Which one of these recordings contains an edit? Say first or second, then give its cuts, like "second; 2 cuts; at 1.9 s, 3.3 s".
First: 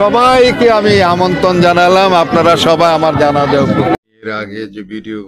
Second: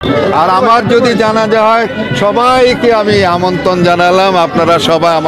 first; 1 cut; at 4.0 s